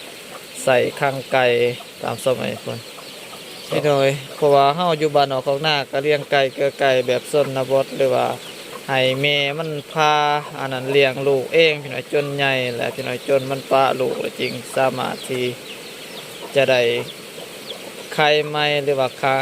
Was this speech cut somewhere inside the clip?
yes; 1 cut; at 3.8 s

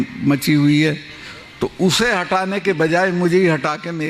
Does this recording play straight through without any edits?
yes; 0 cuts

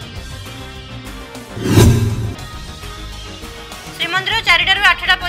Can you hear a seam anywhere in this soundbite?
yes; 1 cut; at 1.4 s

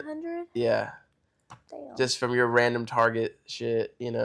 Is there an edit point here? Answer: no; 0 cuts

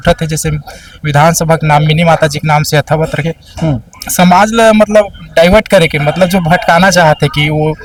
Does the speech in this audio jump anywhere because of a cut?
no; 0 cuts

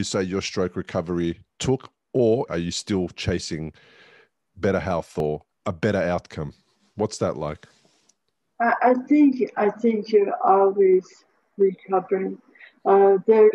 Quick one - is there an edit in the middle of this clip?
yes; 2 cuts; at 2.5 s, 5.2 s

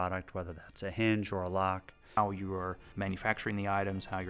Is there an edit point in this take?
yes; 2 cuts; at 2.2 s, 2.8 s

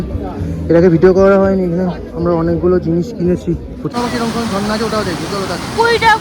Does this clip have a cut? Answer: yes; 1 cut; at 3.9 s

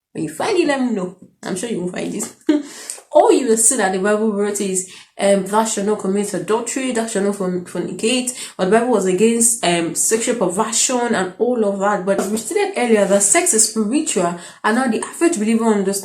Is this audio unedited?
no; 1 cut; at 12.2 s

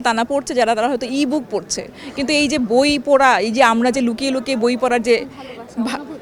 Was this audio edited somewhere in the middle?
no; 0 cuts

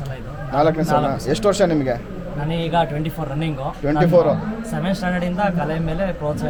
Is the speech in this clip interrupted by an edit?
no; 0 cuts

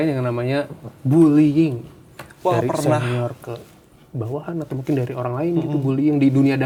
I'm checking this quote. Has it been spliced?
no; 0 cuts

